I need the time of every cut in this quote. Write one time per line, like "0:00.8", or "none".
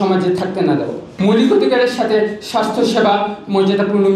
0:01.0